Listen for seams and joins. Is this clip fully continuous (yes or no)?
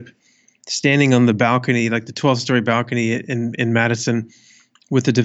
yes